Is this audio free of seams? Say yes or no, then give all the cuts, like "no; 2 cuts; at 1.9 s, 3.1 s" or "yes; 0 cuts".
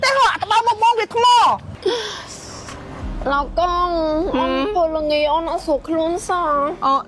no; 1 cut; at 1.7 s